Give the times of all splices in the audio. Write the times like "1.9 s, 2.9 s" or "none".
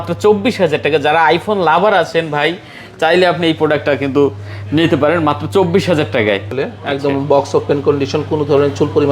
6.5 s